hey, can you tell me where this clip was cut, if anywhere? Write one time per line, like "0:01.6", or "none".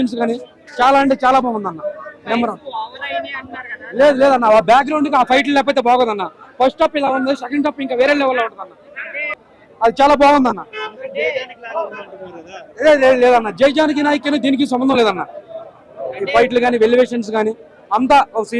none